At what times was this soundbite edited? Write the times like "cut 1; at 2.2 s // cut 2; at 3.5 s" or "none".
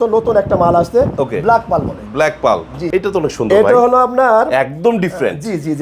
cut 1; at 2.8 s